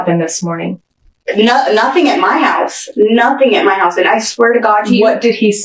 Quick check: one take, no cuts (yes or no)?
yes